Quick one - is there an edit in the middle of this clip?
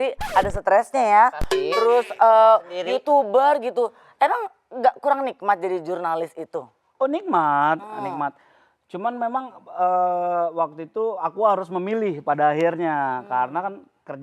no; 0 cuts

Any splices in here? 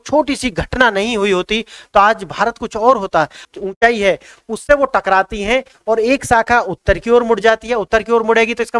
yes; 1 cut; at 3.4 s

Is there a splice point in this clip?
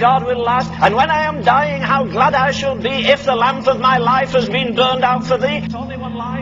no; 0 cuts

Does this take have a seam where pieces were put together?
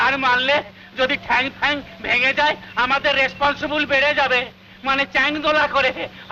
no; 0 cuts

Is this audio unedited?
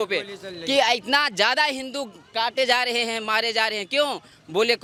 yes; 0 cuts

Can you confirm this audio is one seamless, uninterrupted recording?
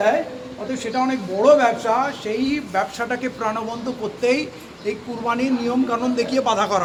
yes; 0 cuts

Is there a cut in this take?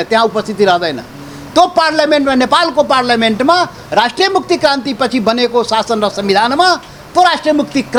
no; 0 cuts

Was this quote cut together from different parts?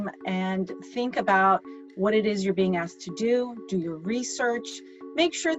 no; 0 cuts

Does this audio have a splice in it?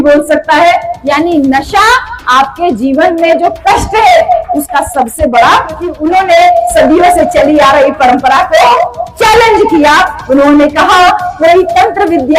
yes; 1 cut; at 5.9 s

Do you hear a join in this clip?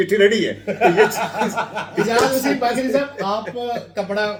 no; 0 cuts

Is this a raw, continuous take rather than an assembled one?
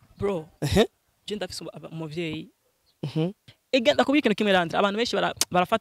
no; 1 cut; at 3.4 s

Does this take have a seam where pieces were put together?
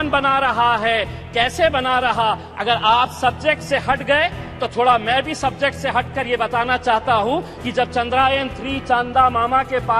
no; 0 cuts

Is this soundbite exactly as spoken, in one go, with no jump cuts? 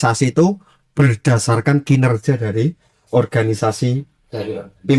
yes; 0 cuts

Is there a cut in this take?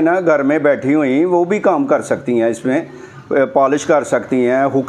no; 0 cuts

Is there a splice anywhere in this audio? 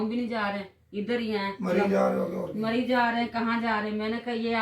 no; 0 cuts

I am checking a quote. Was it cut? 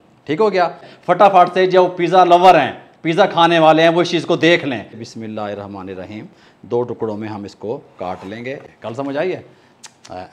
yes; 3 cuts; at 0.9 s, 4.9 s, 8.6 s

